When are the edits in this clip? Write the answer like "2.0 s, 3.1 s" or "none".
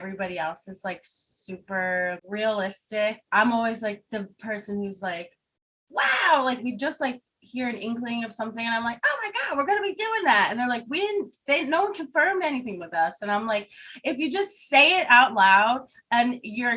3.2 s, 6.6 s

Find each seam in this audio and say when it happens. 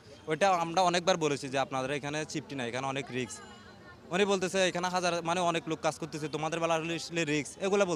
none

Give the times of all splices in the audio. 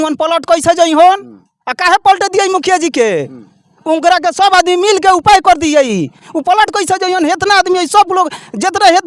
none

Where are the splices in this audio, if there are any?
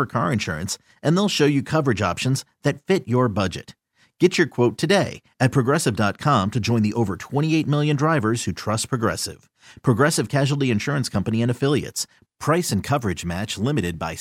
none

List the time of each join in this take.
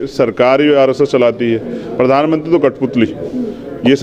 none

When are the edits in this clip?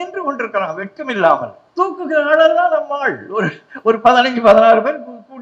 1.6 s

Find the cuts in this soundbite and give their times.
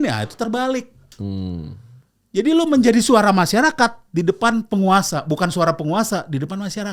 none

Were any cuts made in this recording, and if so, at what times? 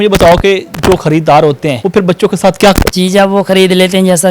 1.8 s, 2.9 s

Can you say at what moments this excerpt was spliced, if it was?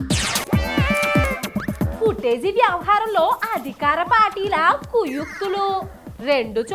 1.2 s

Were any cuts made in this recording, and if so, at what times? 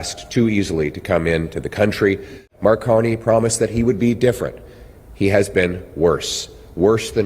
2.5 s

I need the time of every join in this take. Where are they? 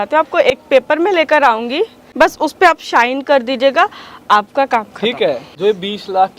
2.0 s, 5.5 s

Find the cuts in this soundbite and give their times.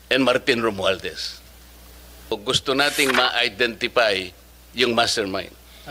2.3 s

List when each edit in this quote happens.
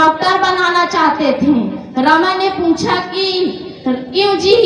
none

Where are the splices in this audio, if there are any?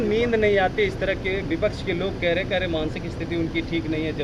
none

